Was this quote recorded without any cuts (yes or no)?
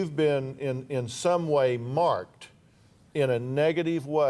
yes